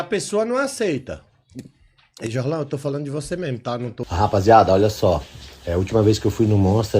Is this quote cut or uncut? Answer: cut